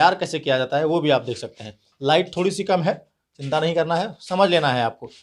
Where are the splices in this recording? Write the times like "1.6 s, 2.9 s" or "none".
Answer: none